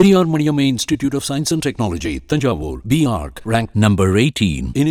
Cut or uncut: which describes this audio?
uncut